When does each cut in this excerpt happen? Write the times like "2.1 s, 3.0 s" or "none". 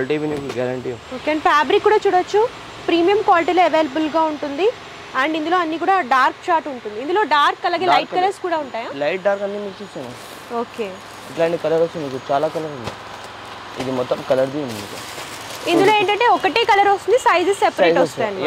none